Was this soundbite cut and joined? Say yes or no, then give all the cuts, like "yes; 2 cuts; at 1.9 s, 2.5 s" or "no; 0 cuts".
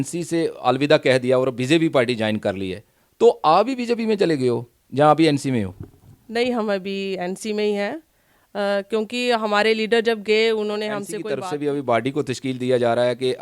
yes; 1 cut; at 11.2 s